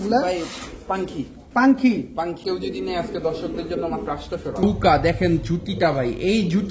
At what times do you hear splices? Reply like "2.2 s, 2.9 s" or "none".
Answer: 2.4 s, 4.6 s